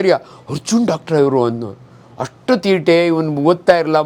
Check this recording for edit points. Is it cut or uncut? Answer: uncut